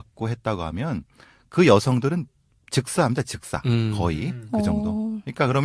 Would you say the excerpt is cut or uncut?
uncut